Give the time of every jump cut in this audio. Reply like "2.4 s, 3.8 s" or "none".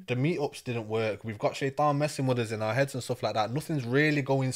none